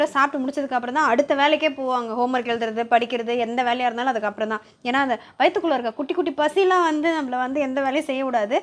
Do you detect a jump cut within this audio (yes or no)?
no